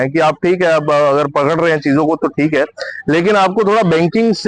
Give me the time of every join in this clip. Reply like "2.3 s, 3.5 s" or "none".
none